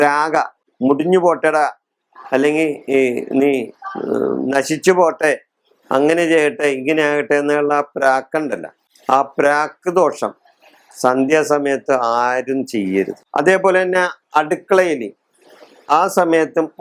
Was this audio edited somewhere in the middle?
yes; 1 cut; at 13.2 s

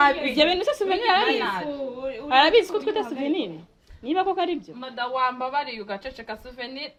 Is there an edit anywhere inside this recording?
no; 0 cuts

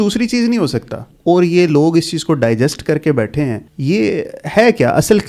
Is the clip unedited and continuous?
no; 2 cuts; at 1.1 s, 3.7 s

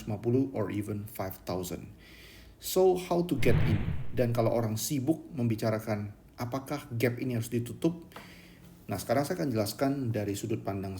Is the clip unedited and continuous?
no; 1 cut; at 4.0 s

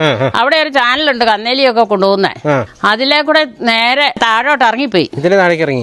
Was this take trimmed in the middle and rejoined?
yes; 2 cuts; at 2.7 s, 4.2 s

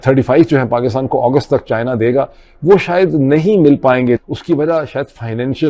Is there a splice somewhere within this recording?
yes; 1 cut; at 4.2 s

